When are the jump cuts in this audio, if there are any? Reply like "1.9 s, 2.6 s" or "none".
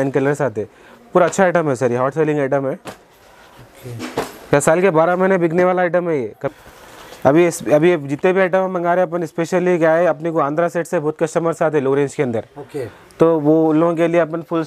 6.5 s